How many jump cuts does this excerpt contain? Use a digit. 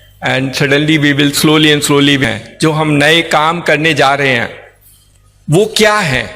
1